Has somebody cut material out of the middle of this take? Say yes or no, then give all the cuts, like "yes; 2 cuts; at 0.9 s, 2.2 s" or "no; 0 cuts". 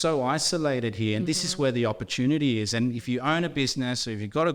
no; 0 cuts